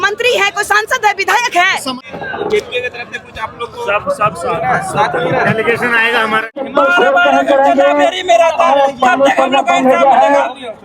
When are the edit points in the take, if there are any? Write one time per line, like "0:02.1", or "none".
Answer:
0:02.0
0:06.6